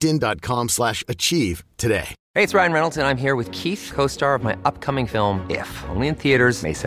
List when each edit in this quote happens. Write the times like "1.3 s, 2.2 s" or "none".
2.2 s